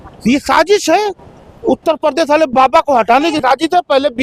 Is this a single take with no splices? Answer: yes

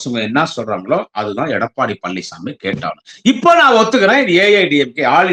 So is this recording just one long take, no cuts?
yes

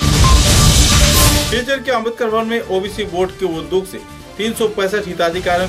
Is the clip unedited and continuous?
no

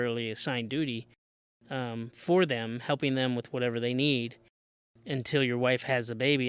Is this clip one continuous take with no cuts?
yes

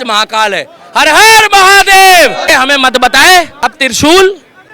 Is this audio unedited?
no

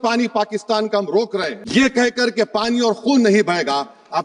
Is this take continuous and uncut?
no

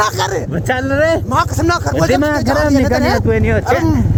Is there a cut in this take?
no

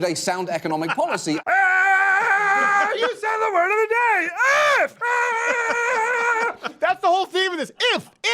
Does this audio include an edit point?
yes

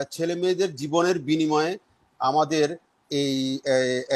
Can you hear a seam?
no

